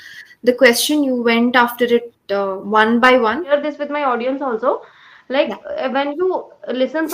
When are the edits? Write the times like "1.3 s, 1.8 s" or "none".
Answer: 3.5 s